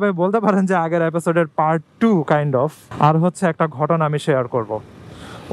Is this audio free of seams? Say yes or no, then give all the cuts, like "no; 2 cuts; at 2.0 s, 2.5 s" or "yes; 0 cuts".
no; 1 cut; at 2.8 s